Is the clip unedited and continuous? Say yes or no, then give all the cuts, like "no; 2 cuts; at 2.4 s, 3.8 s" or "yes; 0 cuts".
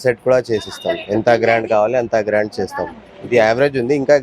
yes; 0 cuts